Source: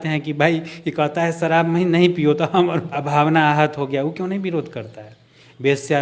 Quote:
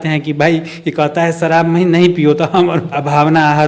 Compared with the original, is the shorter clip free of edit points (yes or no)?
yes